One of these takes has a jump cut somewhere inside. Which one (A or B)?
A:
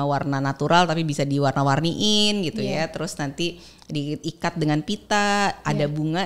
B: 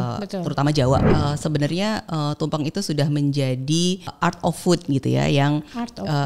B